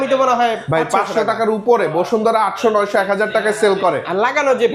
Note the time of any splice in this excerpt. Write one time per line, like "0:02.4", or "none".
none